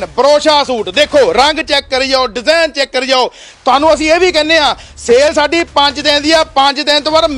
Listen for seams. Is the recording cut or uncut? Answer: uncut